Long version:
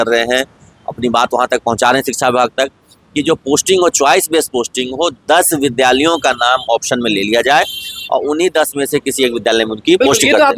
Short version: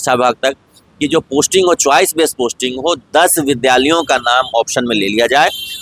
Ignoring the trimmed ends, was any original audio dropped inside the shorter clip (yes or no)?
no